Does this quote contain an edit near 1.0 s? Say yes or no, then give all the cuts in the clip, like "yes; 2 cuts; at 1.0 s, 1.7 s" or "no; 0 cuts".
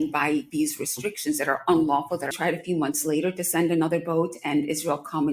no; 1 cut; at 2.3 s